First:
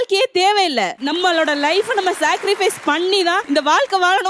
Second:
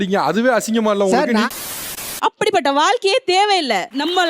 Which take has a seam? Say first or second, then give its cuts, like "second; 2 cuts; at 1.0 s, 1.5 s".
second; 1 cut; at 1.7 s